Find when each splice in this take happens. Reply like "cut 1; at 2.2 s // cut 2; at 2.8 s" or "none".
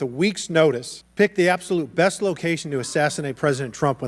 cut 1; at 1.0 s